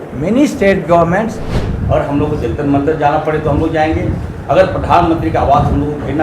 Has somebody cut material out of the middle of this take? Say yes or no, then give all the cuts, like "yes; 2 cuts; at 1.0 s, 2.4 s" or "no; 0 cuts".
yes; 1 cut; at 1.6 s